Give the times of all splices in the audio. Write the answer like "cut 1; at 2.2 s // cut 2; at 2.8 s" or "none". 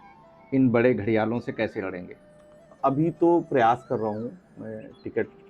cut 1; at 2.7 s